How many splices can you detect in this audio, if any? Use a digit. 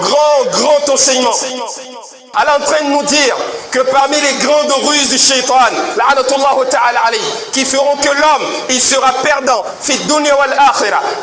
1